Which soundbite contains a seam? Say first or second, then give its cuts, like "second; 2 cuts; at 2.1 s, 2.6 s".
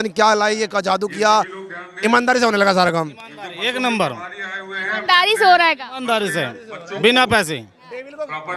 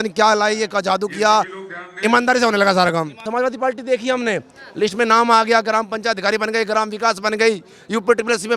second; 1 cut; at 3.2 s